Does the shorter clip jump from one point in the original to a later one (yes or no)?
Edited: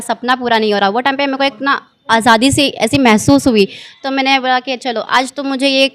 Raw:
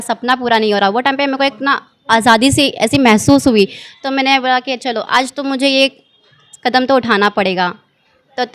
no